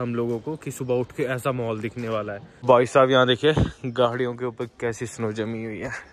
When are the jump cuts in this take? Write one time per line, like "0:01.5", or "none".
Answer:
0:02.5